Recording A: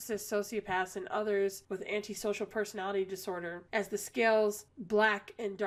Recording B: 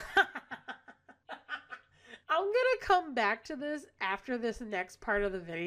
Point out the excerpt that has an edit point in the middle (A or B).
B